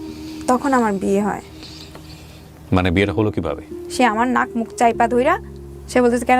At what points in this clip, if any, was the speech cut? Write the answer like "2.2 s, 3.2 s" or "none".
3.6 s